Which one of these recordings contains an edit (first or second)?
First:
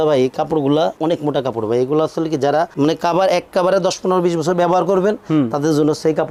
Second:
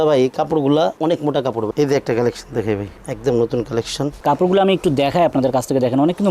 second